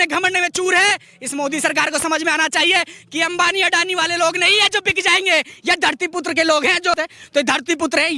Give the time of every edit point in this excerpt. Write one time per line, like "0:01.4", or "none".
0:07.0